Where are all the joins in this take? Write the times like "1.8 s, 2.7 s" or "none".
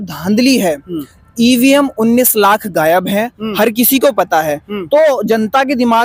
none